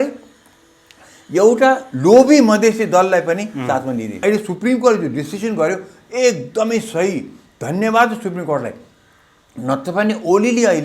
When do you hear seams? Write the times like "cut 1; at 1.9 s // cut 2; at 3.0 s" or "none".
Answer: cut 1; at 4.2 s

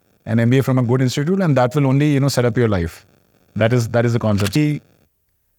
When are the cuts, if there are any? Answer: cut 1; at 4.6 s

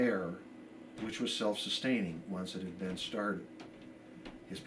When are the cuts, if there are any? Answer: cut 1; at 3.0 s

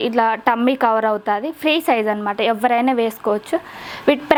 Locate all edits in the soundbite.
none

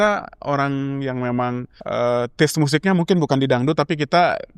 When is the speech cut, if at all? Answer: cut 1; at 1.7 s

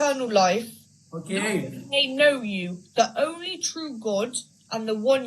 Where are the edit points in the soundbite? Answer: none

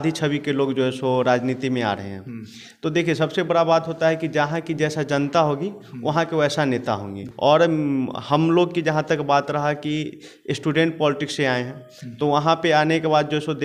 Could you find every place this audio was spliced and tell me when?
none

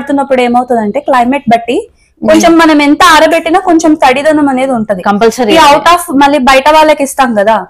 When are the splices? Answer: none

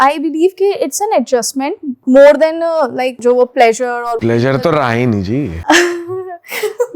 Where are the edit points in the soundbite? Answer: cut 1; at 1.9 s // cut 2; at 3.1 s // cut 3; at 4.2 s // cut 4; at 5.6 s

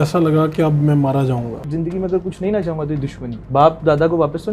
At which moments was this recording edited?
cut 1; at 1.7 s // cut 2; at 3.3 s

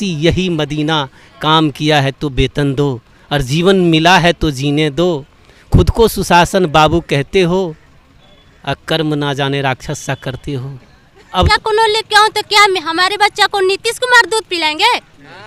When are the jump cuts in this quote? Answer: cut 1; at 11.5 s

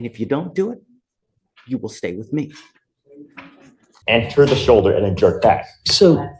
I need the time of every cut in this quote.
cut 1; at 3.9 s

